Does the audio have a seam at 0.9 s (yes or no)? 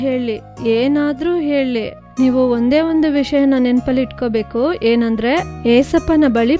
no